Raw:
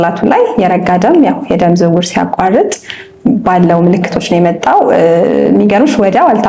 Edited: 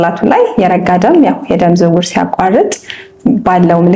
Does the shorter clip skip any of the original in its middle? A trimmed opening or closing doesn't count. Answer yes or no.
no